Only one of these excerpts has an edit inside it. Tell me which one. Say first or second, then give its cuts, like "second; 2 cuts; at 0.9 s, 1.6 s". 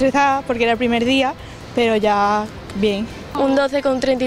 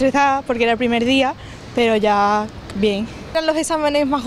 first; 1 cut; at 3.2 s